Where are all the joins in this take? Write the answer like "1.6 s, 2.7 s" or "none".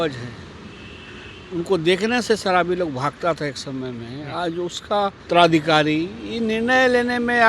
5.2 s

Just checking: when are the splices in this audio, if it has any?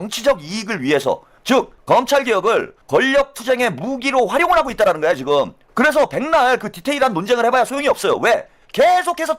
1.6 s, 2.8 s, 5.6 s

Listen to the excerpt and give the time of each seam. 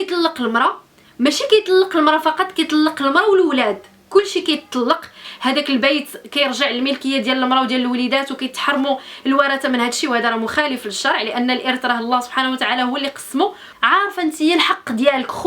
5.2 s, 13.7 s

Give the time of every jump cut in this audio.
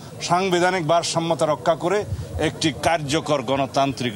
none

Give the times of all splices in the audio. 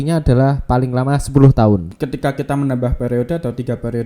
1.9 s

